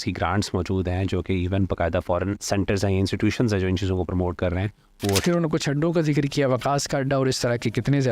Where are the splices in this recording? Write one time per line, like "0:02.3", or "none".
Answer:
0:02.4
0:05.2